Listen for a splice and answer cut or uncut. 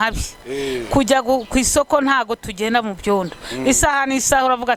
uncut